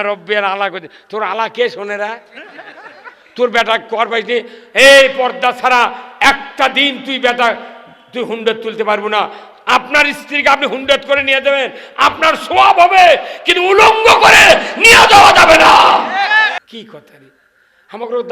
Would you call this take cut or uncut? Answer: cut